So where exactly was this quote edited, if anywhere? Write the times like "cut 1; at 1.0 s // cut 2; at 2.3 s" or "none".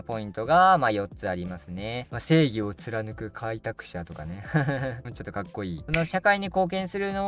cut 1; at 2.1 s // cut 2; at 5.8 s